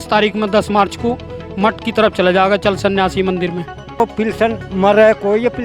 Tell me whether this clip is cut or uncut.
cut